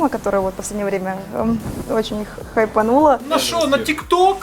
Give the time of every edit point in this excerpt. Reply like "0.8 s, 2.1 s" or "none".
3.2 s